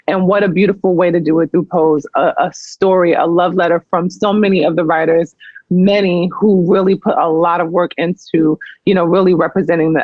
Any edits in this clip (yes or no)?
no